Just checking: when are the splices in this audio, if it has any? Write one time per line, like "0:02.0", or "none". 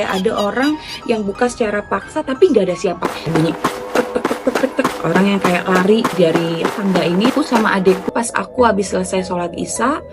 0:03.0
0:08.1